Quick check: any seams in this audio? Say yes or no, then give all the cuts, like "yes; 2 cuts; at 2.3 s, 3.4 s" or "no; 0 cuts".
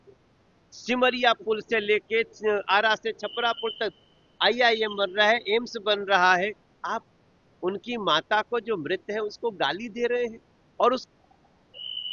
yes; 1 cut; at 11.1 s